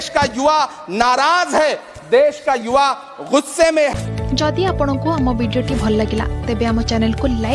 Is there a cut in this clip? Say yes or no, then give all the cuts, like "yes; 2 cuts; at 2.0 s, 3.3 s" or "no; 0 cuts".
no; 0 cuts